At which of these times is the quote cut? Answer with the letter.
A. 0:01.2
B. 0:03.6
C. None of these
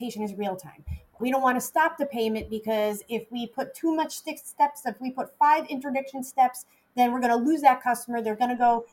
A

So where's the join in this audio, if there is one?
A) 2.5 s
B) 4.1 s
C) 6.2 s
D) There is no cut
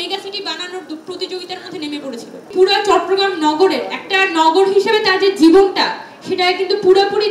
A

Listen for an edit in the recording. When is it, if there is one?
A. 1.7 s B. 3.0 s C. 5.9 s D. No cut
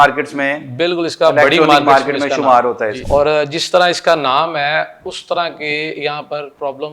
B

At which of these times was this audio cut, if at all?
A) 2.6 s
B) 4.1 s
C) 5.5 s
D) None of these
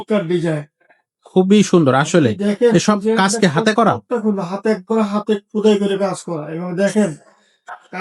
D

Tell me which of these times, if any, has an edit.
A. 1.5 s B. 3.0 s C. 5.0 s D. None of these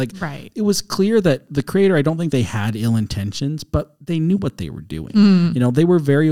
A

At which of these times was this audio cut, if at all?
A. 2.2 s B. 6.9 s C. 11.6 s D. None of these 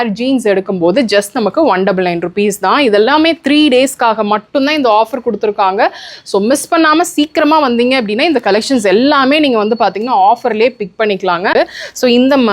C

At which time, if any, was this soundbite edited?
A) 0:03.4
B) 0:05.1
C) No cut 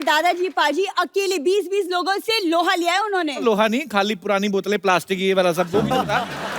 A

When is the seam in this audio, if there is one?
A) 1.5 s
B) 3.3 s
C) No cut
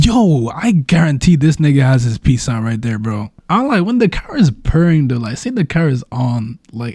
B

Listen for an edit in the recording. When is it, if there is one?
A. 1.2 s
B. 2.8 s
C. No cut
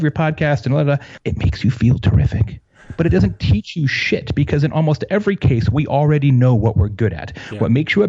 A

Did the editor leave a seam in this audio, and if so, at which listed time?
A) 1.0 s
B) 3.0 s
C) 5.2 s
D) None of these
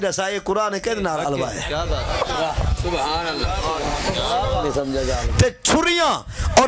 C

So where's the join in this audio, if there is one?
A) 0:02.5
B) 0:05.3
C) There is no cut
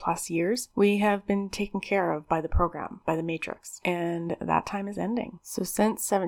B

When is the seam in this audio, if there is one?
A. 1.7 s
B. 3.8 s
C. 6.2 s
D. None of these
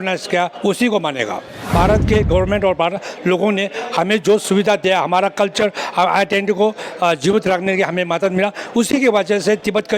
A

